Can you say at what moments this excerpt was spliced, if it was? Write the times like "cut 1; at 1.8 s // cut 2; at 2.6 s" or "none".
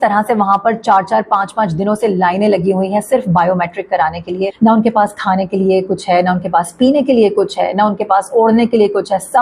cut 1; at 4.5 s

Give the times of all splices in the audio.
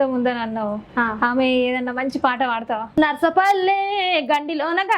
cut 1; at 3.0 s

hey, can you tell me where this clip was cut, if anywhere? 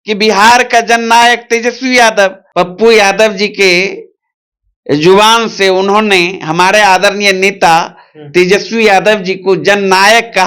cut 1; at 2.4 s

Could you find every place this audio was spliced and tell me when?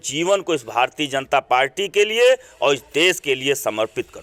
none

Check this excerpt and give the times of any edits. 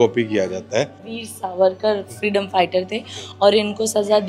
cut 1; at 1.0 s

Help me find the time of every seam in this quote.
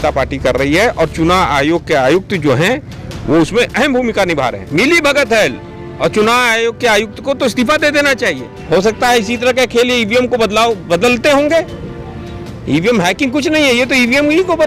cut 1; at 4.6 s // cut 2; at 8.5 s

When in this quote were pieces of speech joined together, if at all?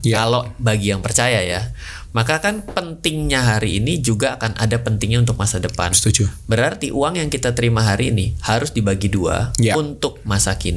none

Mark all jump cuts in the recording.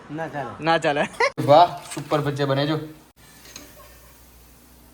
cut 1; at 1.3 s // cut 2; at 3.1 s

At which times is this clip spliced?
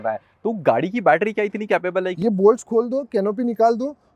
cut 1; at 2.1 s

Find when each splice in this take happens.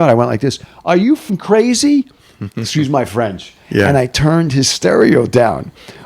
cut 1; at 1.3 s

